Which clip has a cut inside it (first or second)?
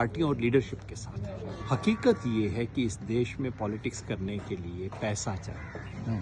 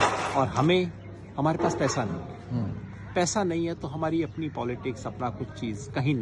first